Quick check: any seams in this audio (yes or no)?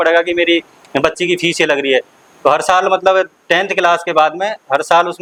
no